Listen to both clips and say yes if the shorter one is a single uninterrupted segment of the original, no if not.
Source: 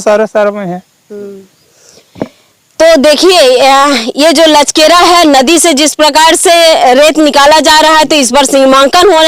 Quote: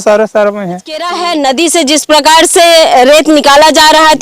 no